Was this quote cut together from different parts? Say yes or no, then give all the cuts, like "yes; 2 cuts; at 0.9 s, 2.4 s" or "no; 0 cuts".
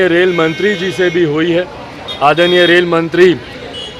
no; 0 cuts